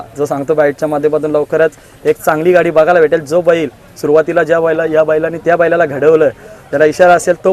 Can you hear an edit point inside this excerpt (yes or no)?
no